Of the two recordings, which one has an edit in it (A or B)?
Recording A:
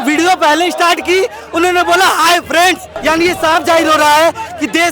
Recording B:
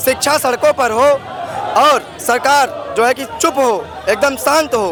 A